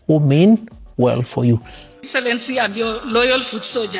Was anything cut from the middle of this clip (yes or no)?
yes